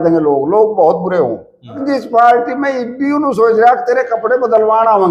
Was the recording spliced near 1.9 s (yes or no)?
yes